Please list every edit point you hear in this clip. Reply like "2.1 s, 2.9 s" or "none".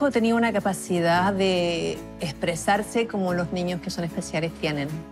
none